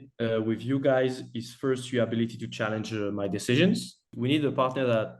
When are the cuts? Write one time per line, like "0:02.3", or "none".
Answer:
0:04.1